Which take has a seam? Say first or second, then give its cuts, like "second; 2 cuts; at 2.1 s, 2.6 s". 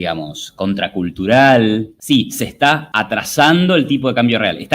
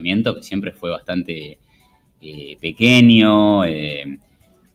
first; 2 cuts; at 1.9 s, 2.9 s